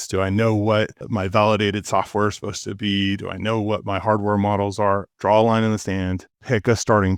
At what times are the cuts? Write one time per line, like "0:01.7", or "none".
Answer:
0:01.0
0:05.1
0:06.3